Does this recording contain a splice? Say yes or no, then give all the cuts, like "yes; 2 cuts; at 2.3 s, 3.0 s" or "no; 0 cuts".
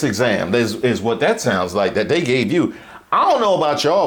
no; 0 cuts